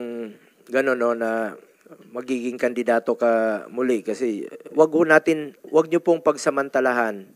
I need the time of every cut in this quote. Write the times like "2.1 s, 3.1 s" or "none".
4.7 s